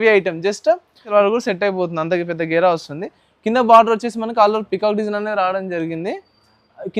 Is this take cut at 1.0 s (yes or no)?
yes